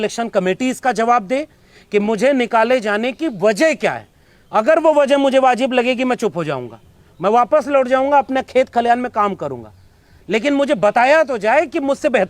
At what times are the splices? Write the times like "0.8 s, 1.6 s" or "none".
none